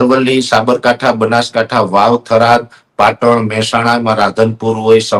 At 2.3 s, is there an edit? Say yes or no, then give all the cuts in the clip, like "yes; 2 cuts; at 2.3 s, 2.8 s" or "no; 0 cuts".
no; 0 cuts